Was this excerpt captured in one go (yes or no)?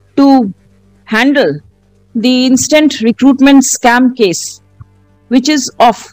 yes